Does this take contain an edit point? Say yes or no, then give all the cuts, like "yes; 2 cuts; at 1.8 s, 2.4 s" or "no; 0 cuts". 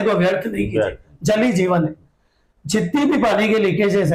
no; 0 cuts